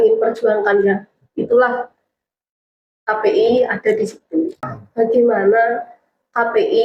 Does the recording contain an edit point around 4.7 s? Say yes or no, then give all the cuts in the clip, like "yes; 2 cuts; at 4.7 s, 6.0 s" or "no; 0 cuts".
yes; 1 cut; at 4.7 s